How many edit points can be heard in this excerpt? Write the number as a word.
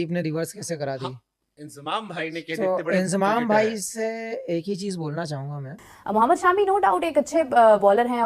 one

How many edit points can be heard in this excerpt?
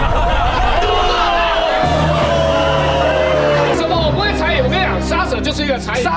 one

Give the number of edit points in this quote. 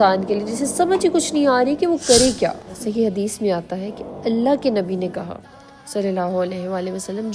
one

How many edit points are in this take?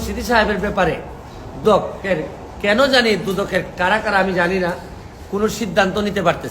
one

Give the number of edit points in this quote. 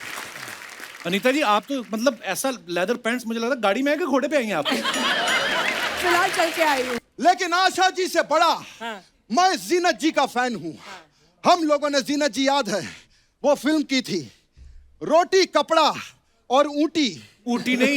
one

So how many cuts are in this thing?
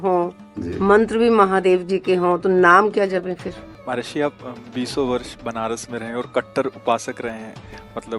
one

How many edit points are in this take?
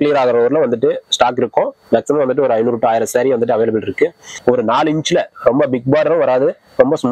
one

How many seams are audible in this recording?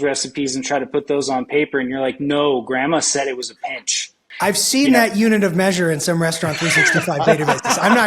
one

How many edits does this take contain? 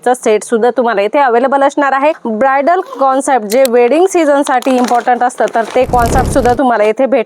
one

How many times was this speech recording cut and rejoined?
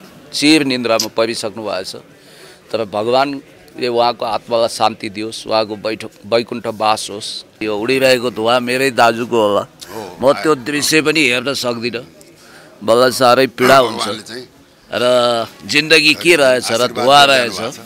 one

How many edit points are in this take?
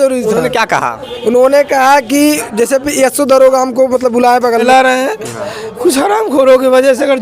one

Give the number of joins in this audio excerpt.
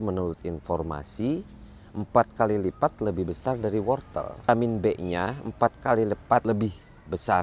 two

